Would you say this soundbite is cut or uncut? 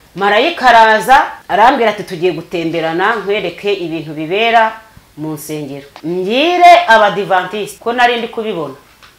cut